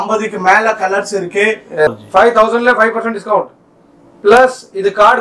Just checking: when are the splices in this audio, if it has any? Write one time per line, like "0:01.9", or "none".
0:01.9